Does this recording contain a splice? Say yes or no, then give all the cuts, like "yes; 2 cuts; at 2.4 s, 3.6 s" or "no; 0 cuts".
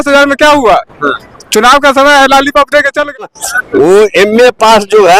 yes; 1 cut; at 3.2 s